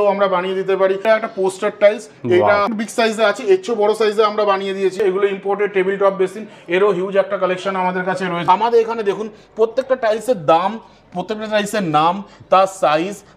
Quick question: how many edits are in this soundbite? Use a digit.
4